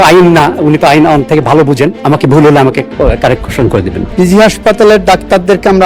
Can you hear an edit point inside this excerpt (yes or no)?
yes